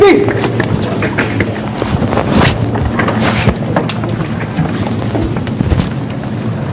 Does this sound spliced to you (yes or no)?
no